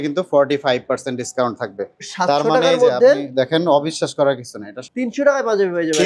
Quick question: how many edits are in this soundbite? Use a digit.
1